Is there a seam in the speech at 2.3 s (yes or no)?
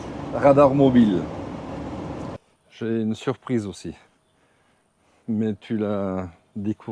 yes